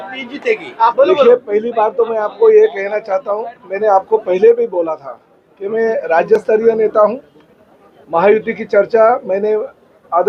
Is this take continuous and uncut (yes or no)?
yes